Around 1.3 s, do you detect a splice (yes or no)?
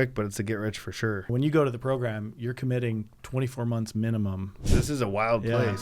yes